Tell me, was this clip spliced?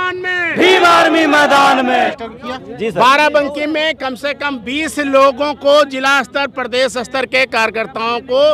no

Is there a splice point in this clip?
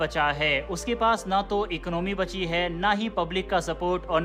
no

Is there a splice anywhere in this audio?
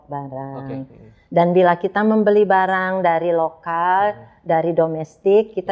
no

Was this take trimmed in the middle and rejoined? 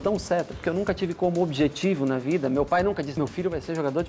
yes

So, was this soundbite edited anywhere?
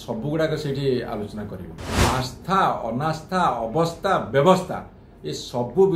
yes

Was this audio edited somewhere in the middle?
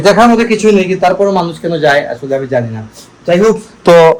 no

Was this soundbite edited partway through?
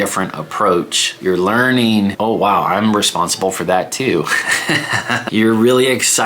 yes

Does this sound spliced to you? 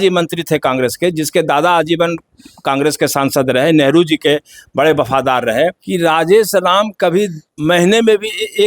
yes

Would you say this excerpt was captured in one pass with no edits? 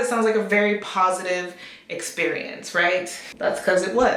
no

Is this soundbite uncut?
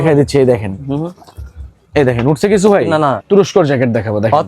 no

